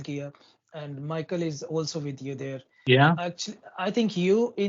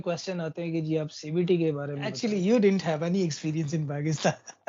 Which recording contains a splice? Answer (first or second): second